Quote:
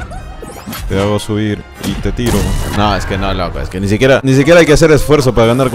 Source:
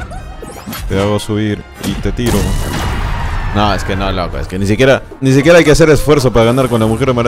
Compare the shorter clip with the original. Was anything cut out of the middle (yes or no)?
yes